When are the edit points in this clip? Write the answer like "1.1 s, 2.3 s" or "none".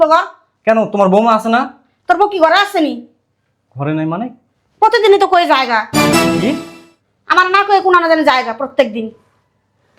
none